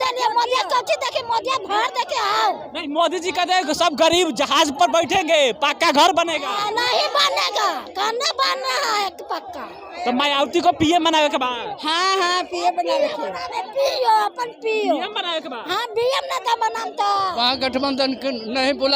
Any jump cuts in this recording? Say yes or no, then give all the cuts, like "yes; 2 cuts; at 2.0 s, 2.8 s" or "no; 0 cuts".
yes; 2 cuts; at 9.9 s, 17.3 s